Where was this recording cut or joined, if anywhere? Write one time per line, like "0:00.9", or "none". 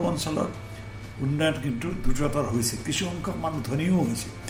none